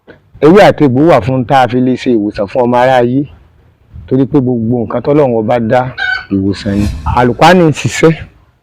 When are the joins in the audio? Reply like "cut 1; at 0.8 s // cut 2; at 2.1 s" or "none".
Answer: cut 1; at 7.0 s

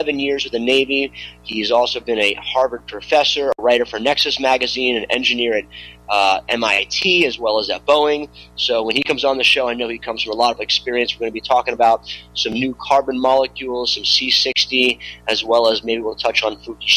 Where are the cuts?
cut 1; at 3.8 s

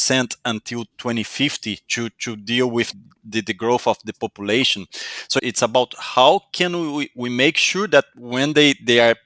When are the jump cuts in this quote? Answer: cut 1; at 3.0 s // cut 2; at 5.4 s

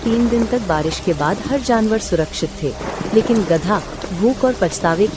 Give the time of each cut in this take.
none

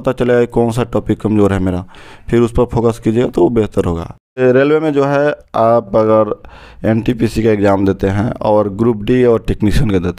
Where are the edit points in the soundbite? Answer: cut 1; at 4.4 s

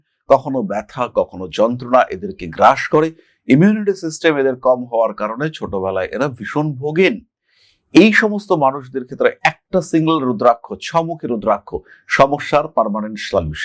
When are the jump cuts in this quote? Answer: none

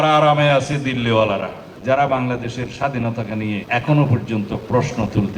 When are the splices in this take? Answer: cut 1; at 1.7 s

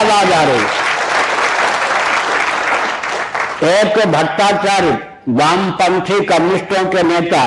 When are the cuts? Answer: none

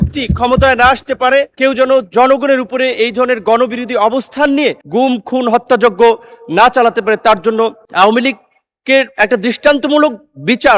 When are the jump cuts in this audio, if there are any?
cut 1; at 1.5 s // cut 2; at 4.8 s // cut 3; at 7.8 s

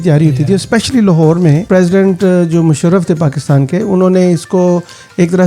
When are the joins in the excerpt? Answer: cut 1; at 1.7 s

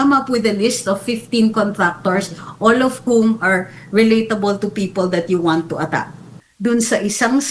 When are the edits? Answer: cut 1; at 6.4 s

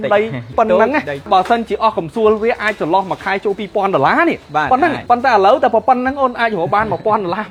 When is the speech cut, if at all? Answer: none

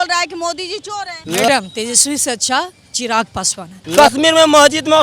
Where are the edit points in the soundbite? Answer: cut 1; at 1.2 s // cut 2; at 3.8 s

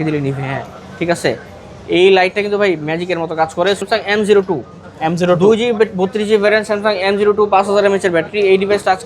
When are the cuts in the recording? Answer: cut 1; at 3.8 s

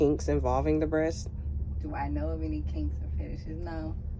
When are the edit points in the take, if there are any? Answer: none

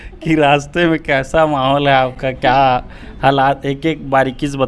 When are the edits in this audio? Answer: none

